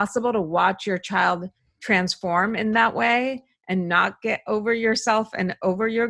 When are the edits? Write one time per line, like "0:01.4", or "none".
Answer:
none